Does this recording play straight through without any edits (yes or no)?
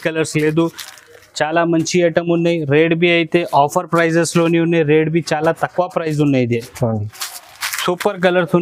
yes